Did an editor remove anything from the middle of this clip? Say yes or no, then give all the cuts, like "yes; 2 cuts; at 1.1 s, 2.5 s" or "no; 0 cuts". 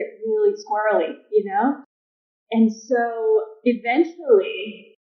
no; 0 cuts